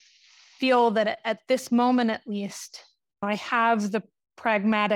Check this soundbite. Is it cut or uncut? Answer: cut